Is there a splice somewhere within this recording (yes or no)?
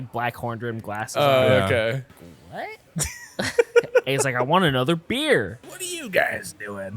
yes